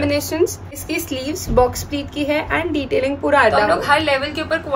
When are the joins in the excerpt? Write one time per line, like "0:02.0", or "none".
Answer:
0:00.8
0:03.7